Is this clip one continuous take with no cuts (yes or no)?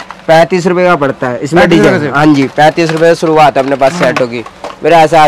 yes